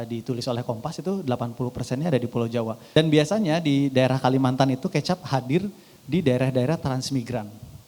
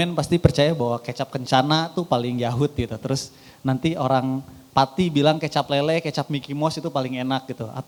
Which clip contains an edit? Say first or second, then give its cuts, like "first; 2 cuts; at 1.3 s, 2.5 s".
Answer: first; 1 cut; at 2.8 s